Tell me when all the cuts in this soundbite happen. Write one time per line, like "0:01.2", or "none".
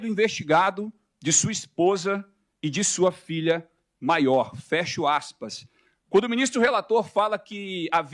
0:05.8